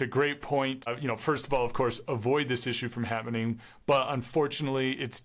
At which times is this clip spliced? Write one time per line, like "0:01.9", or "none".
none